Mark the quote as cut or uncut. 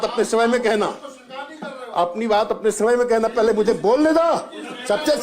uncut